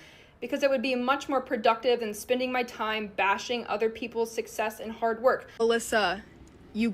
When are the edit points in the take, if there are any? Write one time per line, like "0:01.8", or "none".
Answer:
0:05.5